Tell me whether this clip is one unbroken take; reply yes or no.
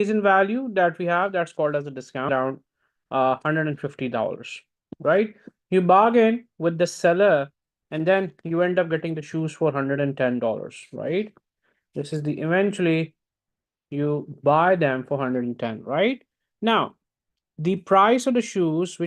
no